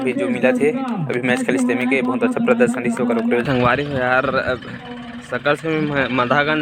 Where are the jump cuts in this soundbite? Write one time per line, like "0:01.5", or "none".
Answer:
none